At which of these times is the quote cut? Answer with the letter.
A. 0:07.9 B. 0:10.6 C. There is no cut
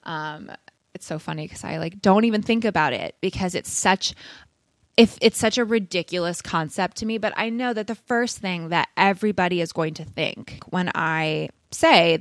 B